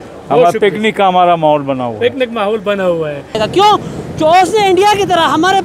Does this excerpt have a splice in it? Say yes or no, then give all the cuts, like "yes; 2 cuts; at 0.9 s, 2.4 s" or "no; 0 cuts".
yes; 1 cut; at 3.4 s